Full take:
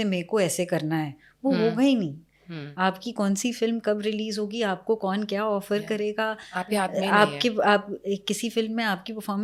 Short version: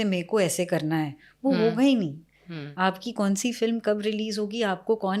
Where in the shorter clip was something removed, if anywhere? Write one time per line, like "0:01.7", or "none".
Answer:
none